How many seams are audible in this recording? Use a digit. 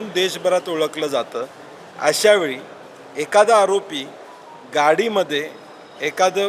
0